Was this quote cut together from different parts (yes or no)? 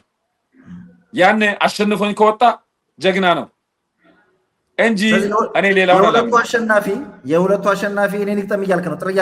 no